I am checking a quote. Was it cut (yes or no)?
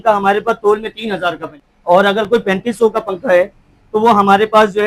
yes